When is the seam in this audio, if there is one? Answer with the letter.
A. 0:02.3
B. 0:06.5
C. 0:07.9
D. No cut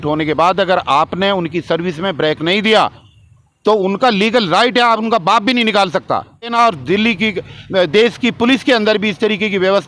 B